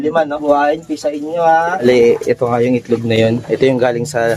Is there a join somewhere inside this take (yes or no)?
yes